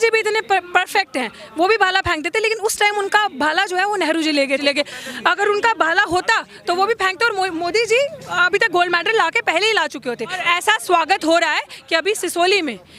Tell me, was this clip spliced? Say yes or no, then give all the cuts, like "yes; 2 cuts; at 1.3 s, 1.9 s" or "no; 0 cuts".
yes; 2 cuts; at 4.6 s, 10.4 s